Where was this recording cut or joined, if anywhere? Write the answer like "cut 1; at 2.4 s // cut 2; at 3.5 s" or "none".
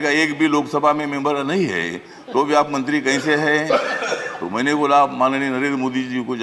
none

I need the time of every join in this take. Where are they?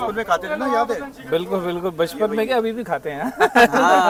none

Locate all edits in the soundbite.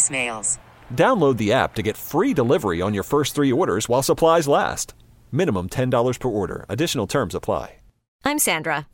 cut 1; at 8.0 s

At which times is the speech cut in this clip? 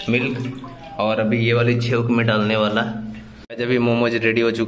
cut 1; at 3.5 s

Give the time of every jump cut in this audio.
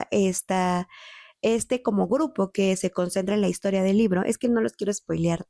none

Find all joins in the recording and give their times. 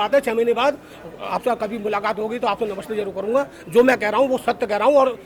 none

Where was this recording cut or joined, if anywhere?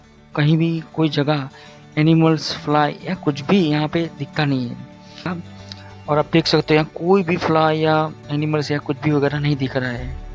cut 1; at 5.3 s

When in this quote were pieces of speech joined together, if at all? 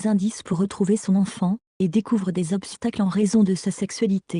cut 1; at 0.9 s

